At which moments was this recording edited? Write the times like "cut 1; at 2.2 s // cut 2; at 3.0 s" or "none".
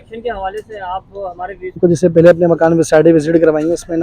cut 1; at 1.8 s